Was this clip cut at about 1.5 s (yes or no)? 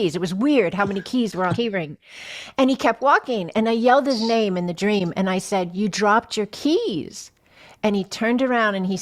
yes